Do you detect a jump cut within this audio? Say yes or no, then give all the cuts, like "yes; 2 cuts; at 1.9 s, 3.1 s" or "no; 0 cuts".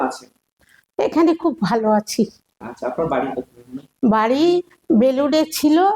no; 0 cuts